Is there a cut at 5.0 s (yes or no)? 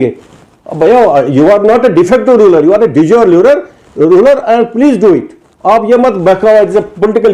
no